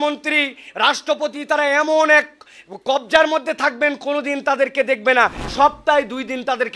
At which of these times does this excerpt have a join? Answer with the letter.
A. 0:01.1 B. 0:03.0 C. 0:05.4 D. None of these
C